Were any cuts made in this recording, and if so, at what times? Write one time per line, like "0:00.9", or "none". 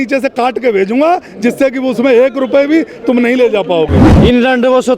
0:04.0